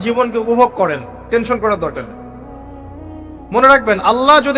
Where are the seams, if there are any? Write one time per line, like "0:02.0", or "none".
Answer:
none